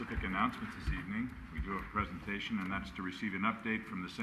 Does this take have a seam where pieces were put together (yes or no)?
yes